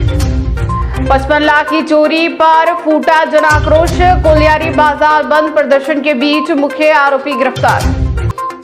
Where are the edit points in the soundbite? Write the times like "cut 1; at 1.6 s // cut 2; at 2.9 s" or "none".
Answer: cut 1; at 0.9 s